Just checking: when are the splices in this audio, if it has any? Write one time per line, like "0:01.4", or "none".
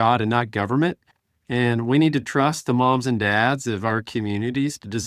none